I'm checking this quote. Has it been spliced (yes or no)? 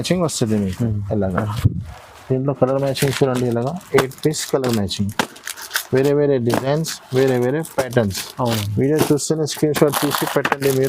no